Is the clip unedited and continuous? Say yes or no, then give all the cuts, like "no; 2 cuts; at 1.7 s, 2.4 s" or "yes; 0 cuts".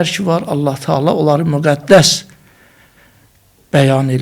yes; 0 cuts